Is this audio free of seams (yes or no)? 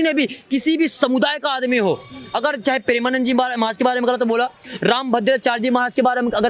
yes